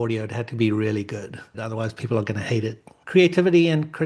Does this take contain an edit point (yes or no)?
yes